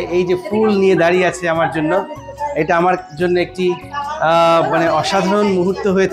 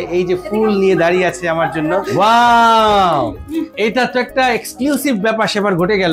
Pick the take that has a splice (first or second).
second